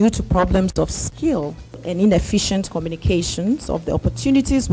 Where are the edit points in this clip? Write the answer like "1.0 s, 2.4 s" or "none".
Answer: 1.8 s